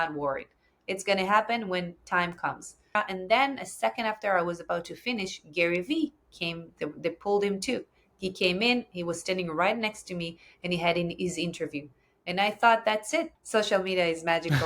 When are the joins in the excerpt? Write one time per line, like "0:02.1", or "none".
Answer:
0:02.9
0:13.4